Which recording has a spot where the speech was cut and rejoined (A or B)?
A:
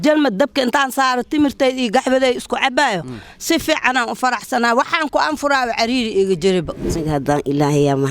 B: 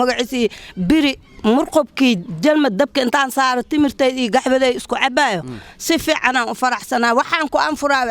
A